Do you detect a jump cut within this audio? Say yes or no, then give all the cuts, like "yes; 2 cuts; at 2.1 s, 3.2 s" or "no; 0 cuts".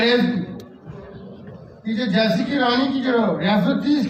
no; 0 cuts